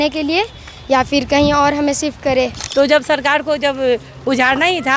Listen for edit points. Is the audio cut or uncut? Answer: cut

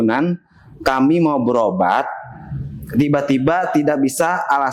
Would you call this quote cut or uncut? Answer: uncut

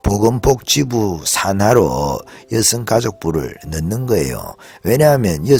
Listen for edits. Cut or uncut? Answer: uncut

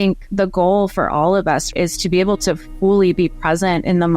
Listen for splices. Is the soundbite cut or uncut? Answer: cut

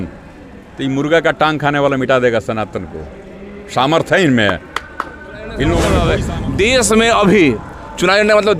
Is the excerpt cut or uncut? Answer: cut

